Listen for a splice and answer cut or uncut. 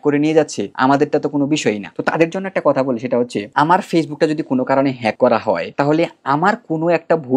uncut